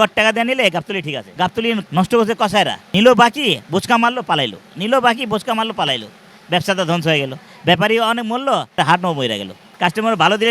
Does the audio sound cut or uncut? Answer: cut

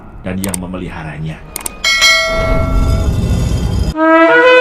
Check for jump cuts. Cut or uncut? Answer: uncut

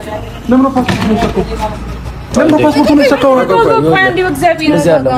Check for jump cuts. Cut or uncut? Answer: uncut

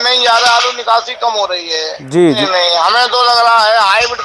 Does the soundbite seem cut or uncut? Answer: cut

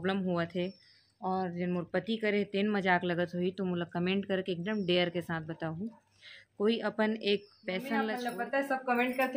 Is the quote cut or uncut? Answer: cut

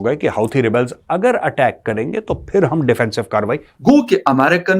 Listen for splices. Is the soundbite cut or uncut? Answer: cut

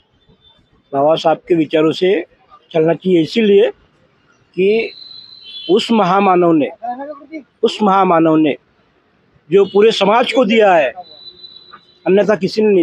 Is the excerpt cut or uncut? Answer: uncut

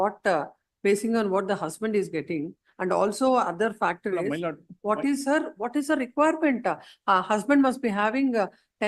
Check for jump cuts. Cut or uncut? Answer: uncut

